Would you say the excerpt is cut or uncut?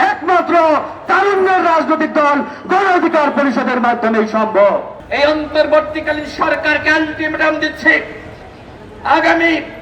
cut